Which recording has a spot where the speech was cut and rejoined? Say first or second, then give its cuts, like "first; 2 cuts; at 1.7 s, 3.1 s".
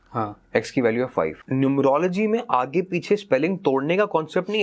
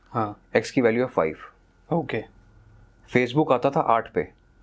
first; 1 cut; at 1.4 s